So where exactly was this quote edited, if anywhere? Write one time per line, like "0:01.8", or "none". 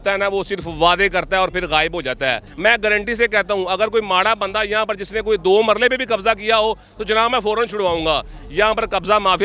0:02.5